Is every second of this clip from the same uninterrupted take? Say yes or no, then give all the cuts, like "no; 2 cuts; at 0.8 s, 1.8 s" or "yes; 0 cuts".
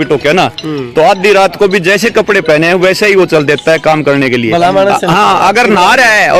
yes; 0 cuts